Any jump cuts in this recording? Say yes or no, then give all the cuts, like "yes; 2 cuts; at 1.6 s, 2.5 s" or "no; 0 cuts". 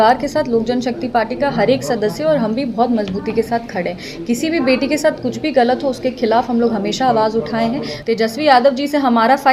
yes; 1 cut; at 7.9 s